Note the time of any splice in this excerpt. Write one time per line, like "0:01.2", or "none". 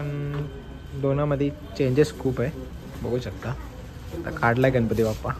none